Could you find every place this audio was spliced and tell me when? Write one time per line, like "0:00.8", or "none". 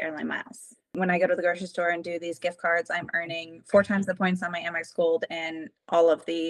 0:01.0